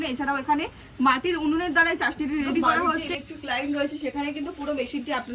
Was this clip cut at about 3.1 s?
yes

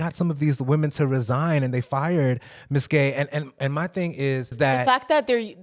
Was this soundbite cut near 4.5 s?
yes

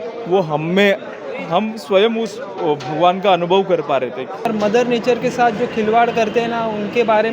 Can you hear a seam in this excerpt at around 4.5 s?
yes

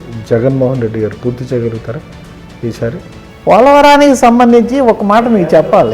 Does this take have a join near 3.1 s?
no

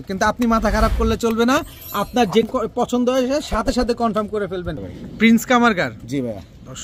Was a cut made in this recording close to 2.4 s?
yes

